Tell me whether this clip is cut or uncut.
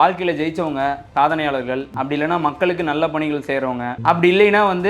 cut